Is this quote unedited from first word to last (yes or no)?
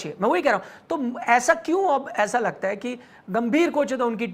no